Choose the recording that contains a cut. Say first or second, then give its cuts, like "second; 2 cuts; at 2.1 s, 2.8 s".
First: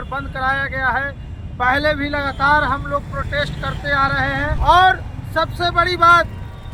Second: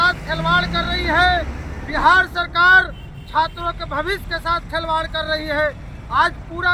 first; 1 cut; at 4.5 s